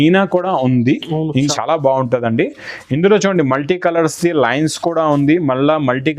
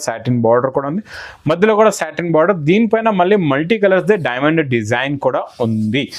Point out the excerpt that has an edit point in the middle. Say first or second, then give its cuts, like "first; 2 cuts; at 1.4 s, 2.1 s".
first; 1 cut; at 1.5 s